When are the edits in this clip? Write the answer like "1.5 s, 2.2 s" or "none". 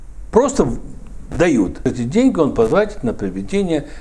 1.8 s